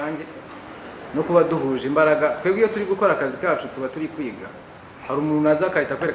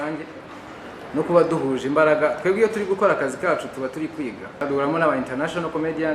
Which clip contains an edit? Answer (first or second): second